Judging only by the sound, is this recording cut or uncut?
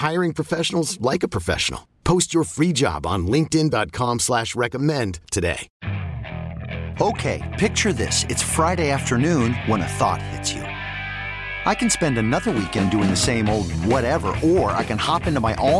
cut